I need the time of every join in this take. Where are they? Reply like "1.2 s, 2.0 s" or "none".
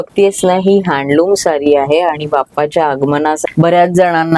3.4 s